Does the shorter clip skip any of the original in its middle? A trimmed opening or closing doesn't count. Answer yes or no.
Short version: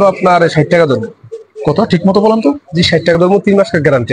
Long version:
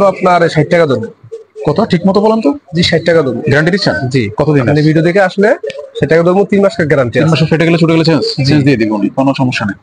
yes